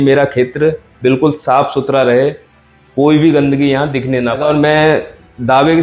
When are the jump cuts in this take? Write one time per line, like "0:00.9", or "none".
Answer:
0:04.4